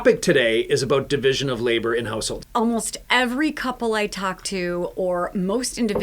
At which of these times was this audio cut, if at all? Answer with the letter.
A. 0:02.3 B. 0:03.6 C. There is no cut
A